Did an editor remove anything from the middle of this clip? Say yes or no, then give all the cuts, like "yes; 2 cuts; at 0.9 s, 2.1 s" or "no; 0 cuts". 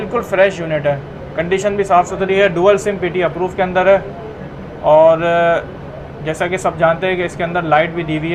no; 0 cuts